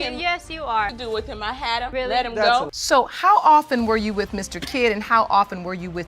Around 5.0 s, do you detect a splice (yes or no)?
no